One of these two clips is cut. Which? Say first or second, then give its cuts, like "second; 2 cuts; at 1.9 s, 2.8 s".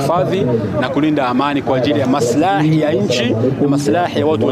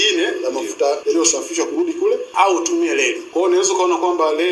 second; 3 cuts; at 1.0 s, 2.3 s, 3.2 s